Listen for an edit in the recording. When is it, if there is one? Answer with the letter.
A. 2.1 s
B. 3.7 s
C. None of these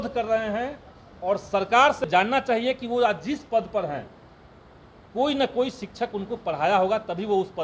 A